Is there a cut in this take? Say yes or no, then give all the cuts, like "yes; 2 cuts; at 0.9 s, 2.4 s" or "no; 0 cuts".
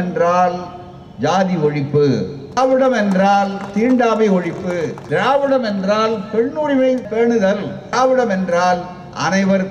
yes; 3 cuts; at 2.6 s, 5.0 s, 7.3 s